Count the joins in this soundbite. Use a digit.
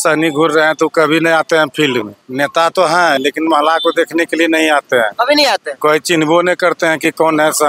1